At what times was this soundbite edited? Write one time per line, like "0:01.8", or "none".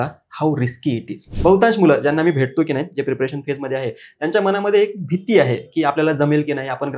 0:01.3